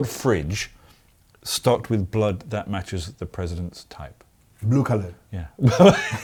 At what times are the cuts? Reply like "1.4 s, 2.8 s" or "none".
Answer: none